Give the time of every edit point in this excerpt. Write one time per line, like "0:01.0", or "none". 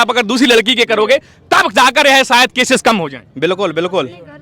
none